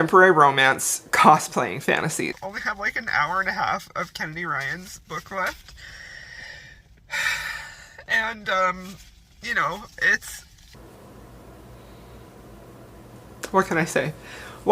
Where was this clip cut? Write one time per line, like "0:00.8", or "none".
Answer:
0:02.3
0:10.6